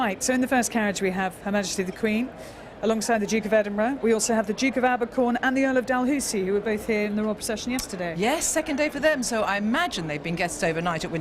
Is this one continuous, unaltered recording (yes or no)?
yes